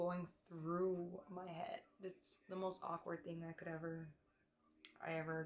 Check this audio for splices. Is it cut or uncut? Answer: uncut